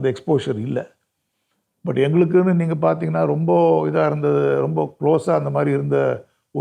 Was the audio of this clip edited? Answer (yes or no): no